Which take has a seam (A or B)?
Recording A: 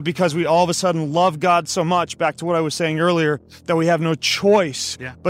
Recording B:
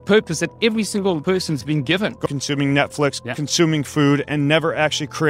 B